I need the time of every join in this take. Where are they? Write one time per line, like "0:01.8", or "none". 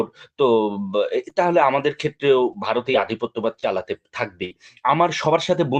0:04.7